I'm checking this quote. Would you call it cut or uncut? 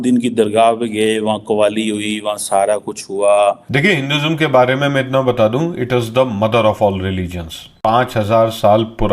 cut